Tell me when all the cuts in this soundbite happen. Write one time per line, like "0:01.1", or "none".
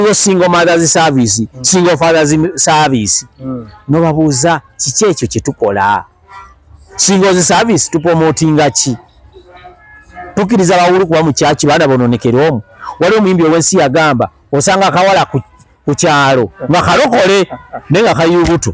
none